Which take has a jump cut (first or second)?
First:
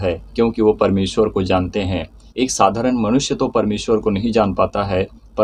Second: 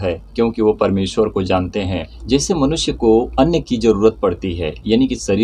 second